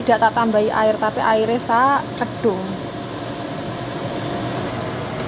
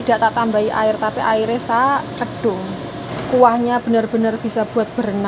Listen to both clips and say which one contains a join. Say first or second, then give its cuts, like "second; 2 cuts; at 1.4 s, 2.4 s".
second; 1 cut; at 3.1 s